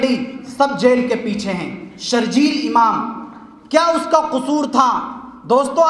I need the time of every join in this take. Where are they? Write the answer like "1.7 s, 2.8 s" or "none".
none